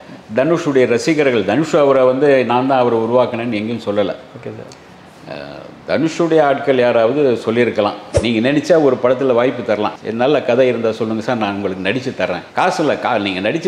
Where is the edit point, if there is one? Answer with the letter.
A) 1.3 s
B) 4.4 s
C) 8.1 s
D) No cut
C